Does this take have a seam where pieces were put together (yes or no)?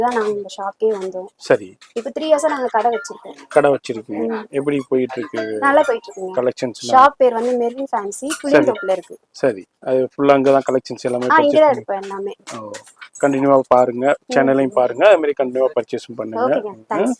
no